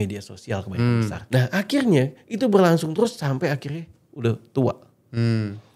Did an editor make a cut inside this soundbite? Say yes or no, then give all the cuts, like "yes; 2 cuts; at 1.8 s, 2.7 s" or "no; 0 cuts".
yes; 1 cut; at 1.2 s